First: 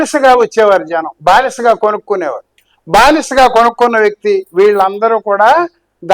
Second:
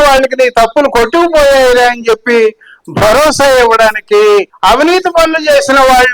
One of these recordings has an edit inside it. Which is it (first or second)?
second